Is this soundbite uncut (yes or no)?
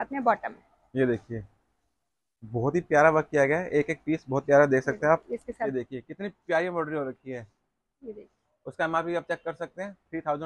no